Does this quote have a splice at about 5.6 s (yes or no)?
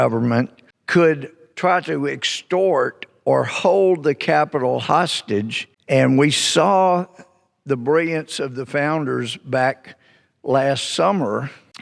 yes